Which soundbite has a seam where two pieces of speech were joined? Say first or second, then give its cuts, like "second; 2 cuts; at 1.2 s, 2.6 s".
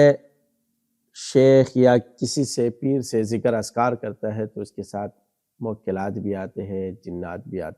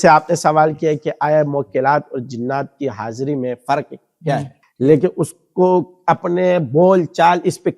second; 1 cut; at 4.6 s